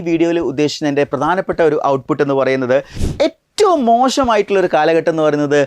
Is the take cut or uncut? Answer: cut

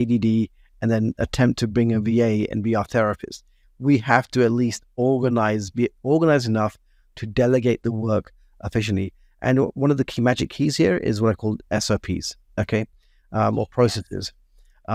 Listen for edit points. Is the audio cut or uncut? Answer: uncut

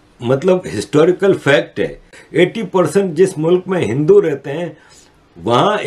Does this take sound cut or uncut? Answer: cut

